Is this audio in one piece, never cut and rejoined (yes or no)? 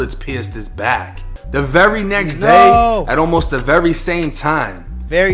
no